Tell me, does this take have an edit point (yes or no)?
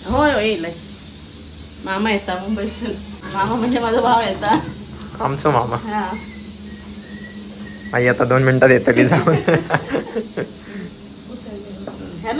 yes